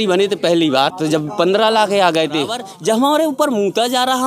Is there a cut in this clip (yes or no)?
yes